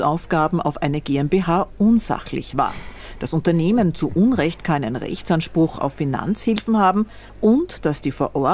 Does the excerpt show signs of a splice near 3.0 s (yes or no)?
no